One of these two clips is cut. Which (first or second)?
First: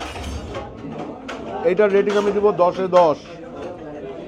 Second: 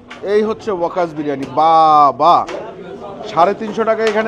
first